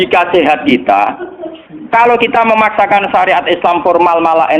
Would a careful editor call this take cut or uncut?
uncut